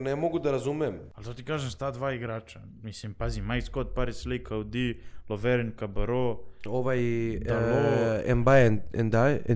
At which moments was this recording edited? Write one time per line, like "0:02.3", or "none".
0:01.1